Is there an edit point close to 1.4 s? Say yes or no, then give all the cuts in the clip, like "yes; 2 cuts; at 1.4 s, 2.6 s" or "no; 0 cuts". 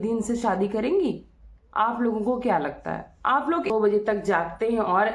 no; 1 cut; at 3.7 s